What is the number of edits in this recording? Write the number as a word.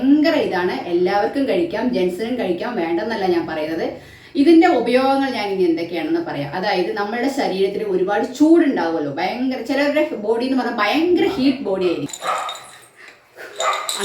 one